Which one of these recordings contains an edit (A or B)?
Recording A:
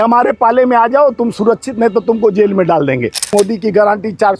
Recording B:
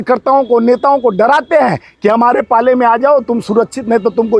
A